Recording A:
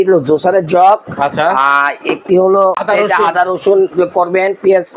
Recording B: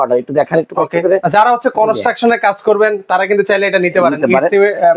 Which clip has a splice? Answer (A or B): A